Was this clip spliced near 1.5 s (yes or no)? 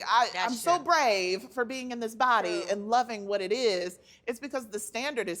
no